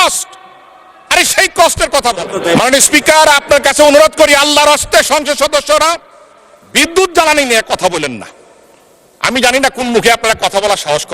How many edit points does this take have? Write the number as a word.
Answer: one